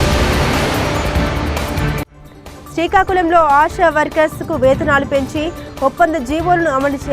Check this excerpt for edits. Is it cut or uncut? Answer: uncut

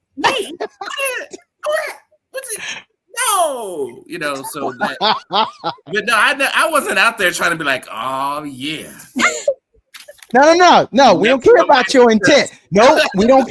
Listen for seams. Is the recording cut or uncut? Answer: uncut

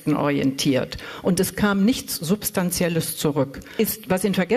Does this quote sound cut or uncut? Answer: cut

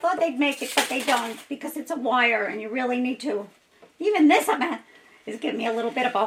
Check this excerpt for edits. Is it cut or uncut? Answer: uncut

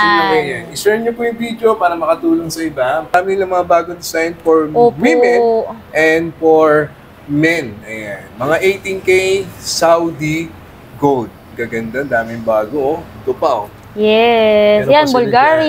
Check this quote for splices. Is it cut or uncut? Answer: cut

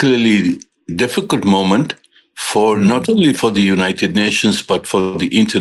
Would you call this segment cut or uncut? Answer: uncut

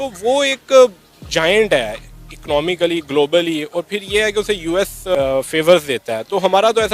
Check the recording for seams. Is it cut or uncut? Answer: cut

